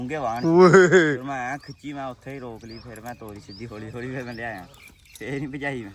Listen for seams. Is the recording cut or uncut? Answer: uncut